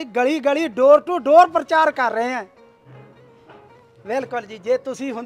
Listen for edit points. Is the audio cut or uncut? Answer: uncut